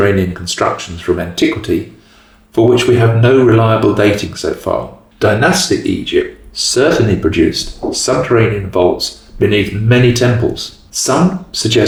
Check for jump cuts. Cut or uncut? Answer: uncut